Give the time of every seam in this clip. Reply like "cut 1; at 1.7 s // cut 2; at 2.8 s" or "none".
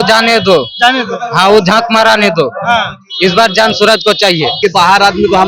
cut 1; at 4.6 s